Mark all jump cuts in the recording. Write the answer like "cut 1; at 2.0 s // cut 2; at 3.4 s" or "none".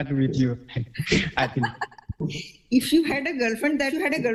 none